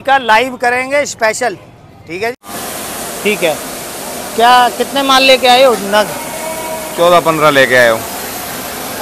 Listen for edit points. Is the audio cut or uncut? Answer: cut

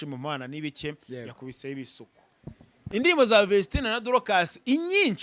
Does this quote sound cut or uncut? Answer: cut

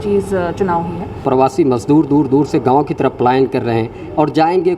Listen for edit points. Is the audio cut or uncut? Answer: cut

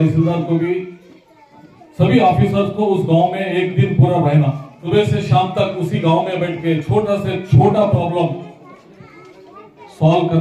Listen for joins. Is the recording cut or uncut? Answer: cut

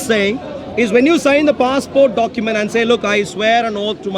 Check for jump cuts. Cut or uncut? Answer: uncut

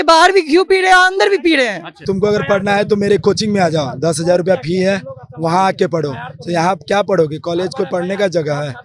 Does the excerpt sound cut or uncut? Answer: cut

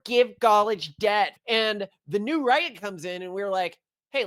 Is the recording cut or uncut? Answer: cut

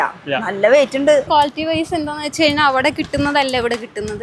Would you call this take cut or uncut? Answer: cut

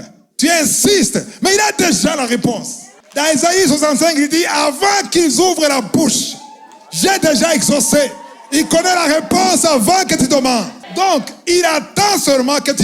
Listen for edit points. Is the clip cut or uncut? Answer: uncut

